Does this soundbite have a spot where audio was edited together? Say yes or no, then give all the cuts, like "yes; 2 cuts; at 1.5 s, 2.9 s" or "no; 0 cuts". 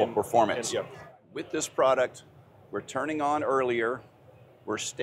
yes; 1 cut; at 1.2 s